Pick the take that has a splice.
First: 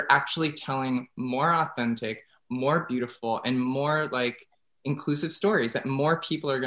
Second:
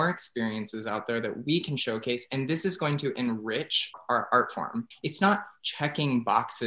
second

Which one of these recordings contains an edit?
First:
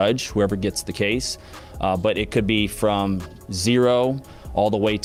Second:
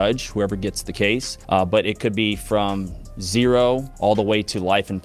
second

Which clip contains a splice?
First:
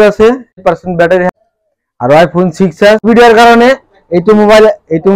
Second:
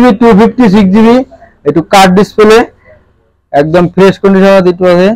first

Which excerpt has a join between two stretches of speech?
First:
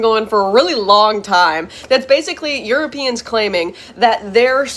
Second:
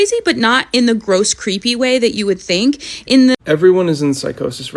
second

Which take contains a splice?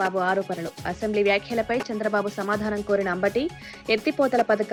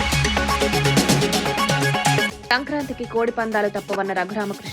second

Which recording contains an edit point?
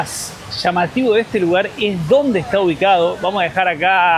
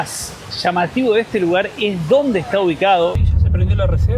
second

